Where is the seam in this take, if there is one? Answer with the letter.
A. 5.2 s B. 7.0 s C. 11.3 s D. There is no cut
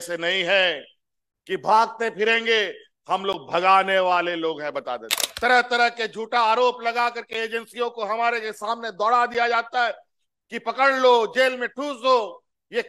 A